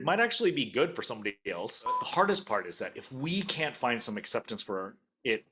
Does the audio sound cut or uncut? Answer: cut